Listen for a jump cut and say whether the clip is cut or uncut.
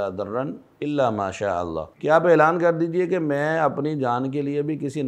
cut